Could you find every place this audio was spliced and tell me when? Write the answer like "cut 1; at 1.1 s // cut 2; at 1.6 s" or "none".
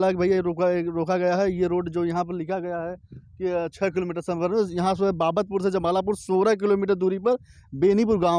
none